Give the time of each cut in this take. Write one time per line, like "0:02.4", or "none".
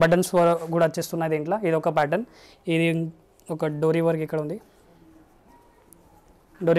none